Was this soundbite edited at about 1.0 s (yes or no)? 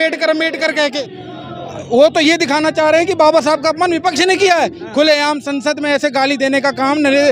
yes